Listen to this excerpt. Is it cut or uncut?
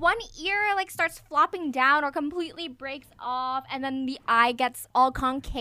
uncut